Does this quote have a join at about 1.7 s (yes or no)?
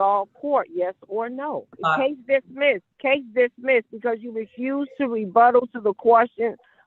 yes